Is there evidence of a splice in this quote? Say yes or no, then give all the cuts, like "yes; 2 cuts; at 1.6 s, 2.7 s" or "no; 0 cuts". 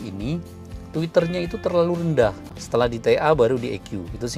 yes; 1 cut; at 2.5 s